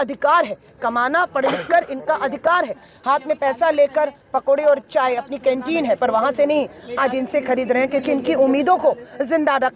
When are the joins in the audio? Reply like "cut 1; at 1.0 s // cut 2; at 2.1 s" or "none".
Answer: cut 1; at 2.9 s